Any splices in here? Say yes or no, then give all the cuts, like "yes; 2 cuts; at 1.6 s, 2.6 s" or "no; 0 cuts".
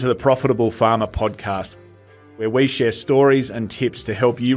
no; 0 cuts